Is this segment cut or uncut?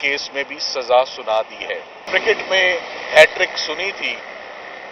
cut